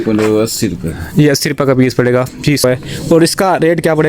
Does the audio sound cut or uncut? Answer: cut